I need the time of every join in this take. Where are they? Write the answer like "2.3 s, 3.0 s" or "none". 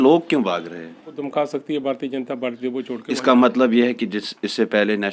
1.1 s